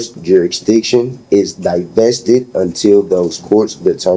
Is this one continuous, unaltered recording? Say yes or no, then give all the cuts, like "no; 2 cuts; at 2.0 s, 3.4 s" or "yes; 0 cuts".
yes; 0 cuts